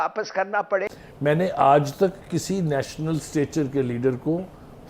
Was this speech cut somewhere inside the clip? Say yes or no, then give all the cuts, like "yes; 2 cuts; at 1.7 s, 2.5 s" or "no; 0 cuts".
yes; 1 cut; at 0.9 s